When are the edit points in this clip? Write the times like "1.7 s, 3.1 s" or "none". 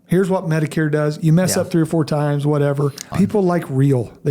3.0 s